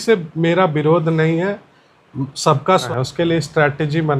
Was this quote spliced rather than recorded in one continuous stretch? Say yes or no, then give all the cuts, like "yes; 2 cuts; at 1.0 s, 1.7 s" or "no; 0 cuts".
yes; 1 cut; at 2.9 s